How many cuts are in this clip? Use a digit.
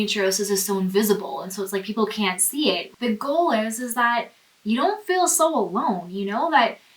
1